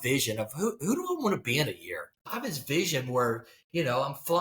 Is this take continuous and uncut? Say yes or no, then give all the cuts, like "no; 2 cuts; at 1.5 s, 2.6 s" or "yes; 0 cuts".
no; 1 cut; at 2.2 s